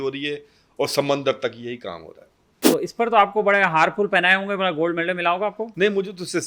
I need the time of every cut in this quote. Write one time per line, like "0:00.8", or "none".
0:02.6